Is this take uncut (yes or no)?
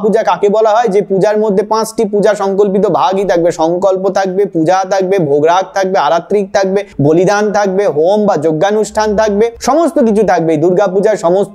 yes